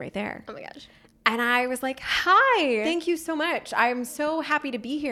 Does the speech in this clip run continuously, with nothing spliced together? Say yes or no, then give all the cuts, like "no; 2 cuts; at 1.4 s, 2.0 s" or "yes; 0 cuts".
no; 1 cut; at 2.9 s